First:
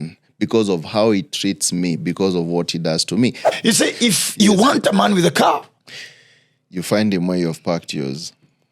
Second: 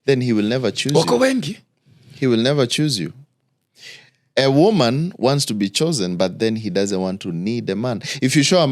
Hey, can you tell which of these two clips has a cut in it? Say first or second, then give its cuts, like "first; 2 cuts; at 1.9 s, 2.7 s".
first; 1 cut; at 3.4 s